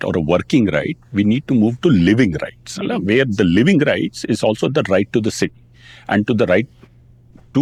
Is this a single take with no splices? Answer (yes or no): yes